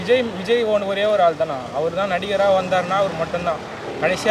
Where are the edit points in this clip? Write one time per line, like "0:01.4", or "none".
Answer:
none